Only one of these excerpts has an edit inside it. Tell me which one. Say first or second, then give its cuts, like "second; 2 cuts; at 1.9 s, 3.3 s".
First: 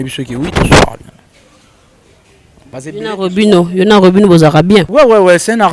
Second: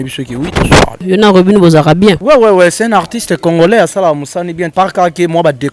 second; 2 cuts; at 1.0 s, 4.7 s